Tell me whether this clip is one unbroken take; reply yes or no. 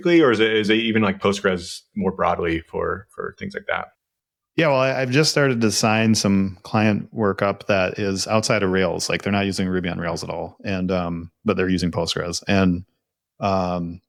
yes